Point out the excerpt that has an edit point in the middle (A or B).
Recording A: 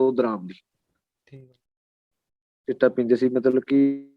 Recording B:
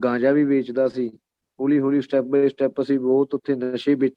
A